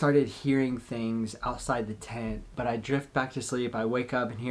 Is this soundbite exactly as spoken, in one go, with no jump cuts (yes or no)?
no